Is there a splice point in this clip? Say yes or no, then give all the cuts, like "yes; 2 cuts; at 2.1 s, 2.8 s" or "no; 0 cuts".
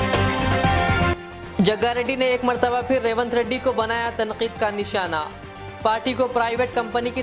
yes; 1 cut; at 1.1 s